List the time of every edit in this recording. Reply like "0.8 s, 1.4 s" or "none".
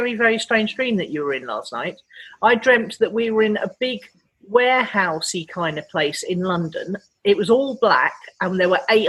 none